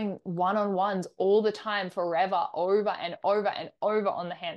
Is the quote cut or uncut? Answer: uncut